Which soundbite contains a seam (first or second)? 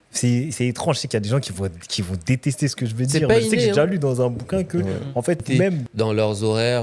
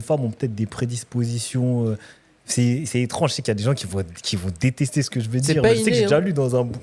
first